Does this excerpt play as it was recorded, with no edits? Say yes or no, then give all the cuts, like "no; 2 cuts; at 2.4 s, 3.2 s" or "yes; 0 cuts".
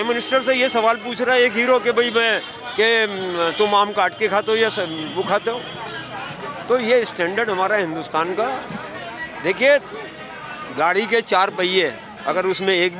yes; 0 cuts